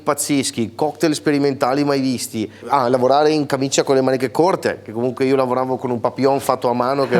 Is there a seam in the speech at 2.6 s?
yes; 1 cut; at 2.6 s

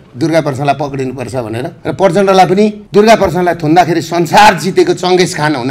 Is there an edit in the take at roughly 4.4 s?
no; 2 cuts; at 1.7 s, 2.8 s

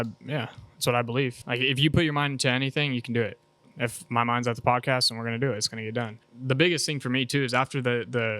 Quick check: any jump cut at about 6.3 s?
yes; 3 cuts; at 1.4 s, 4.0 s, 6.3 s

